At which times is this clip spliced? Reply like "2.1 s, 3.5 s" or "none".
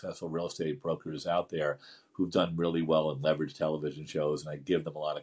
none

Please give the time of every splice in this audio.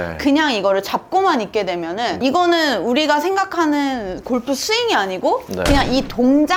none

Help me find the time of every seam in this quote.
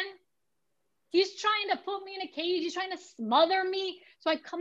none

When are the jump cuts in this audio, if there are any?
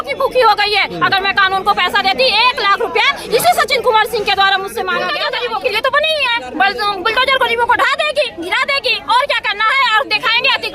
5.1 s

